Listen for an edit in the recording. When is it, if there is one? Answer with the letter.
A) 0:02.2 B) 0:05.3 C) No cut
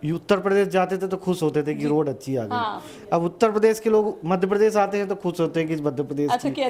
C